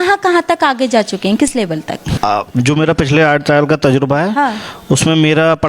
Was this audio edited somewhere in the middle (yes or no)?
yes